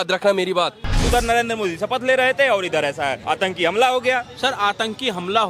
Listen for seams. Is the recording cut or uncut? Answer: cut